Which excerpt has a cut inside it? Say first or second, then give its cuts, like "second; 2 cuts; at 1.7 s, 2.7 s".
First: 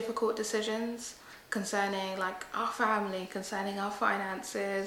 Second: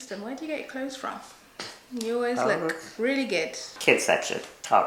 second; 1 cut; at 3.7 s